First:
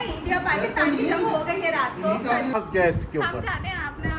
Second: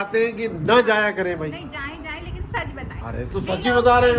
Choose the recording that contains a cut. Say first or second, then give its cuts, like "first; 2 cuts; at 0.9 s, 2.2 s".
first; 1 cut; at 2.5 s